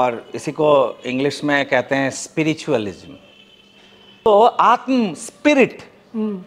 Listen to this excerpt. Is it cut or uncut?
cut